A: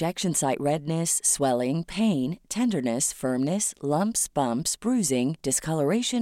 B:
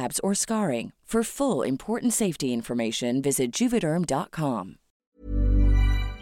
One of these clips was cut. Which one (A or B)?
B